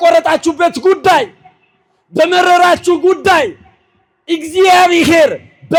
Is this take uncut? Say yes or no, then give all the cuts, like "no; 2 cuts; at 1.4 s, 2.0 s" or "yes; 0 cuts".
yes; 0 cuts